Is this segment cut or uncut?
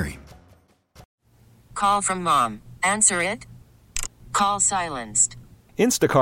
cut